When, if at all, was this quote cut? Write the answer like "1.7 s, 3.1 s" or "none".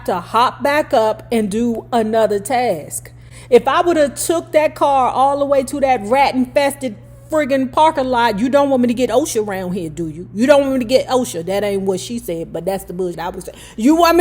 13.2 s